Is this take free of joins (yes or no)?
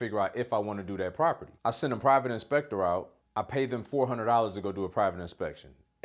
no